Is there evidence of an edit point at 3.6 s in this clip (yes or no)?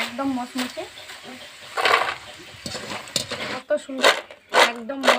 yes